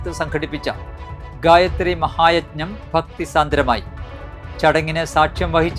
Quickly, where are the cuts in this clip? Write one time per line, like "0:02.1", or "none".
none

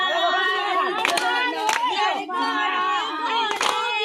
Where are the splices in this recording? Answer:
none

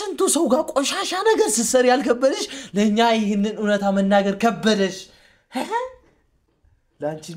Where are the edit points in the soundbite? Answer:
none

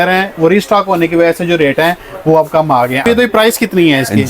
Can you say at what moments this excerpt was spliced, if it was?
0:02.9

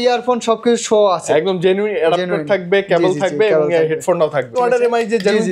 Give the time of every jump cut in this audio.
0:04.6

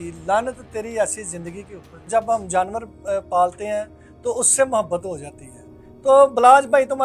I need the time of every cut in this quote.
0:02.0

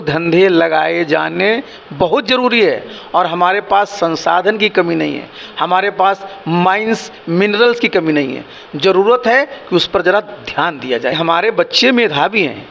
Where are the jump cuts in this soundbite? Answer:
0:11.4

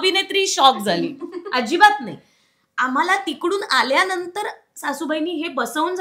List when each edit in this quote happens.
none

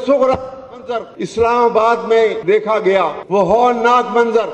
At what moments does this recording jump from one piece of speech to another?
0:01.2
0:02.4
0:03.2

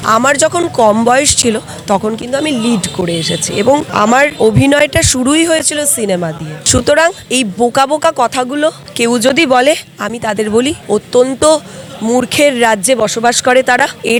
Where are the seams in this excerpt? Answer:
none

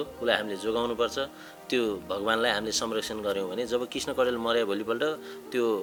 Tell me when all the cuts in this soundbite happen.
none

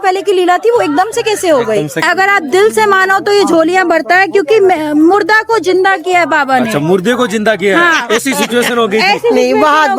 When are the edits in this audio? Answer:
0:02.0

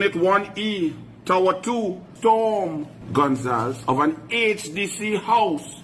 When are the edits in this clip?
0:02.1
0:02.9

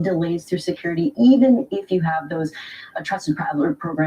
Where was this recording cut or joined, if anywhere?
0:03.2

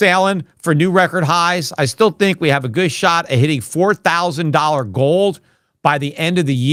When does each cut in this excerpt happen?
none

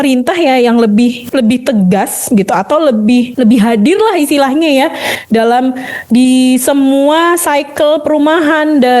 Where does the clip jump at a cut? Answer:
0:01.2
0:03.3

